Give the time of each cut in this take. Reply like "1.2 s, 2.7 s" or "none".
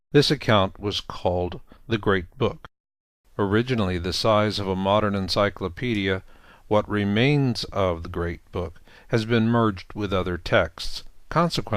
none